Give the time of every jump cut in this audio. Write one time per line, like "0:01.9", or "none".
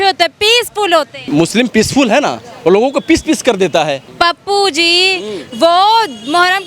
0:01.3
0:04.0

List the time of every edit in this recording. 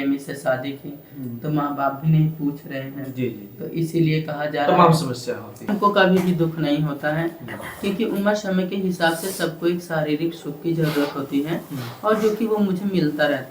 0:05.7

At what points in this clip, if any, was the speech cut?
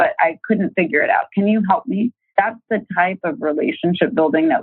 0:02.2

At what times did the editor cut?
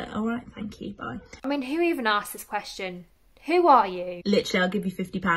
0:01.4
0:04.1

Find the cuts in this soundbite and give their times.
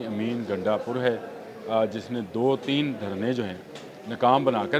none

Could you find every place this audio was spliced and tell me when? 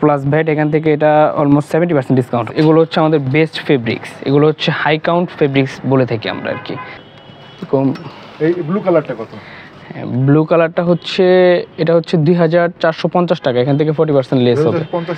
0:02.5
0:06.8

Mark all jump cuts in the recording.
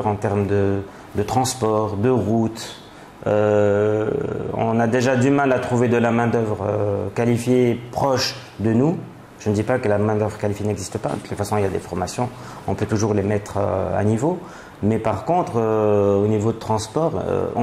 none

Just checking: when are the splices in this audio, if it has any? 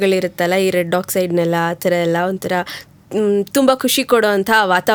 none

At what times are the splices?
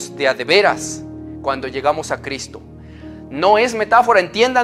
none

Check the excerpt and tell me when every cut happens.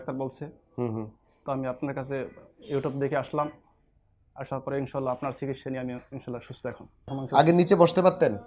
0:07.0

